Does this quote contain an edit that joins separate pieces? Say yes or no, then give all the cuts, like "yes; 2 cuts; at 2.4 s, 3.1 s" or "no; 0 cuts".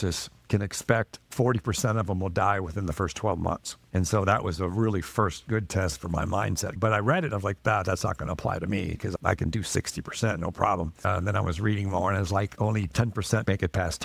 no; 0 cuts